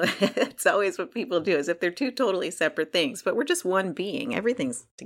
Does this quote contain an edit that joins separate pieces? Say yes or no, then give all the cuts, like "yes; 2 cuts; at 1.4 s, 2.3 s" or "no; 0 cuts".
no; 0 cuts